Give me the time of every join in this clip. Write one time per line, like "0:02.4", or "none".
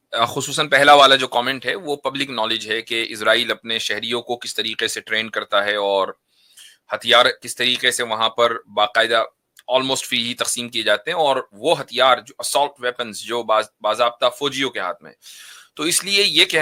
none

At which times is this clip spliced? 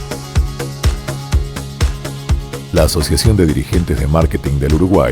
0:02.3

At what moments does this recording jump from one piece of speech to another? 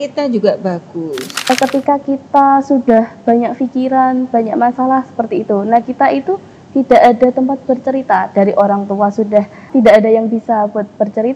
0:01.5
0:09.7

